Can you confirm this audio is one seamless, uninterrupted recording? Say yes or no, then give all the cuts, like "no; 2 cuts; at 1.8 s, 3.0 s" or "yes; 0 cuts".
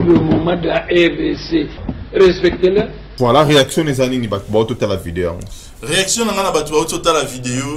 no; 1 cut; at 3.0 s